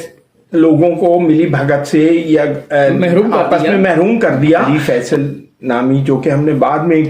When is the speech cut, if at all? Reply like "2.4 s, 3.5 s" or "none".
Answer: 4.6 s